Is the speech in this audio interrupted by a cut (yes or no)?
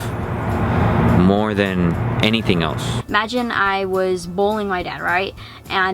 yes